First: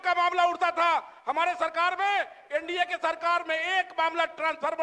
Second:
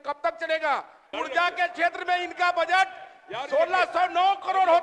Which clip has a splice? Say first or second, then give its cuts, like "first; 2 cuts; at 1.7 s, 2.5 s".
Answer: second; 1 cut; at 1.0 s